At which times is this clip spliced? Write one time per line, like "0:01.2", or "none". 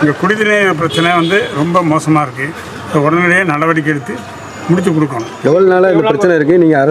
none